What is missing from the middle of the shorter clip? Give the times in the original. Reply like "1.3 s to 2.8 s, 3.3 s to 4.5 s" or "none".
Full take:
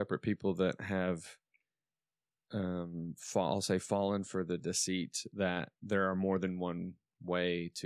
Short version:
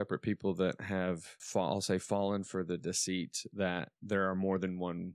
1.3 s to 3.1 s